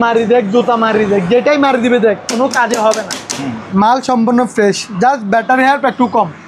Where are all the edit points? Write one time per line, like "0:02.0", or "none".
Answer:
0:03.6